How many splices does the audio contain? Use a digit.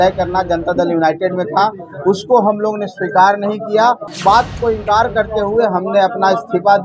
1